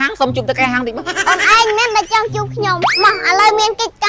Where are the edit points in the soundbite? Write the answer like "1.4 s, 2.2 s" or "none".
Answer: 0.9 s, 2.8 s